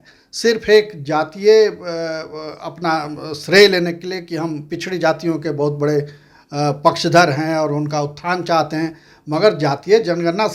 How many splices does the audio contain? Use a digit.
0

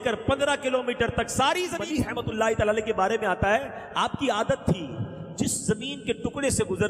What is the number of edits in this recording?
1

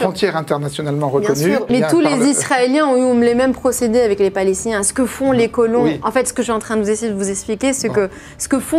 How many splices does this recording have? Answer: 1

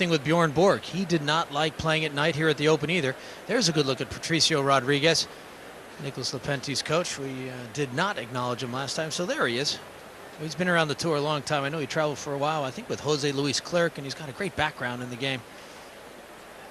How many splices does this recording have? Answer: 1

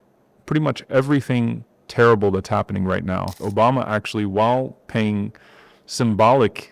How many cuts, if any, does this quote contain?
1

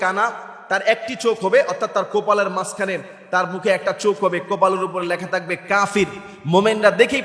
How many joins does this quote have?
0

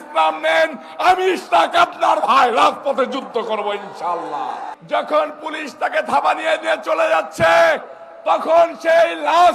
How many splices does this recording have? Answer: 1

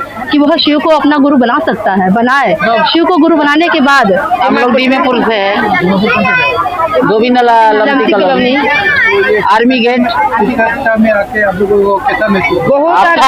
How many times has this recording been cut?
1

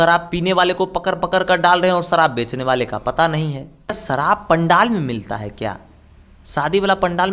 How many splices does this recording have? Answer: 1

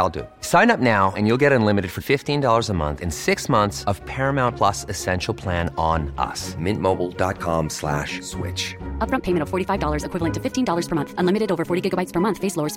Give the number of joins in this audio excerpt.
0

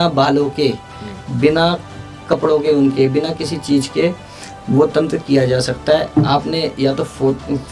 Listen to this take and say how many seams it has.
0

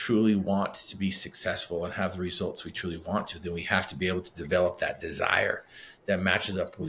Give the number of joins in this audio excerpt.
0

